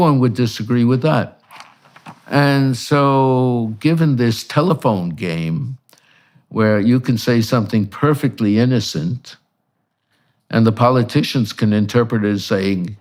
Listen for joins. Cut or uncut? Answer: uncut